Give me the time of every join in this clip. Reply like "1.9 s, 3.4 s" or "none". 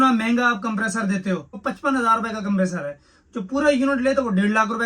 1.6 s